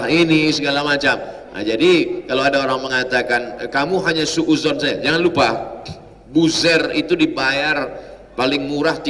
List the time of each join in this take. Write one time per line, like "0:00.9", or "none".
none